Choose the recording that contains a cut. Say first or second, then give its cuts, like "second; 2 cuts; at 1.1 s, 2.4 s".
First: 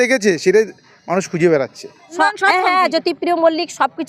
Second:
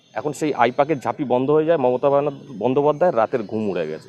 first; 1 cut; at 2.1 s